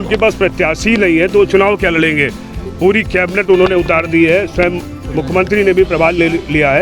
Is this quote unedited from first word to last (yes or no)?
yes